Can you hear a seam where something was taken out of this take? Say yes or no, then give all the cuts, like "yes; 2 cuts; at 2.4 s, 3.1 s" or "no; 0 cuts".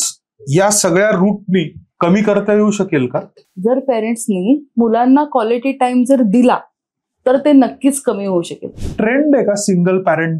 yes; 2 cuts; at 3.4 s, 8.7 s